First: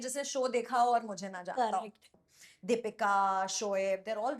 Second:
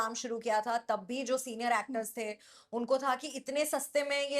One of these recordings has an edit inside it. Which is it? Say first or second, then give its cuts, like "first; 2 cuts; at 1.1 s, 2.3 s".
first; 1 cut; at 2.1 s